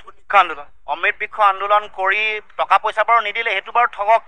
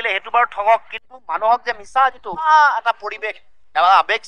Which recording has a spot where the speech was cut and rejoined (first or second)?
second